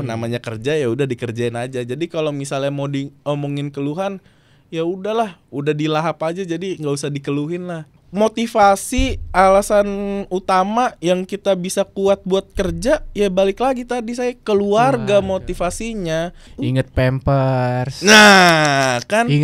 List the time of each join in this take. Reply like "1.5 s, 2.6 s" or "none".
7.9 s, 16.5 s